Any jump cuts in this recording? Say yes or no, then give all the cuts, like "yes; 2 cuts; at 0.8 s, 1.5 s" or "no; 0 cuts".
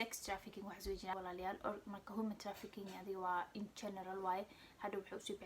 yes; 1 cut; at 1.1 s